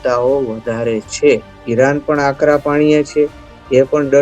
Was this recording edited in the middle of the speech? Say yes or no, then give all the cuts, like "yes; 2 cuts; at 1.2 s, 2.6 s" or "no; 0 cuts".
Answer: yes; 1 cut; at 1.6 s